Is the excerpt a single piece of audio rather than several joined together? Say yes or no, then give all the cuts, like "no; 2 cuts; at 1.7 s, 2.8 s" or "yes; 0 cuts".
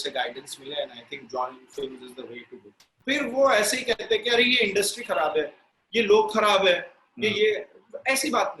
no; 1 cut; at 2.9 s